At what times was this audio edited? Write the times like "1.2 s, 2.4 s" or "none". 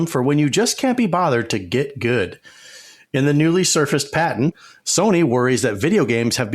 4.6 s